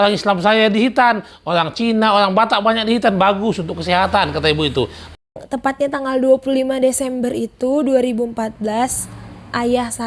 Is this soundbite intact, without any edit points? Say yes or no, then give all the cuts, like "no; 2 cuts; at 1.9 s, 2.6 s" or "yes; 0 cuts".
no; 1 cut; at 5.1 s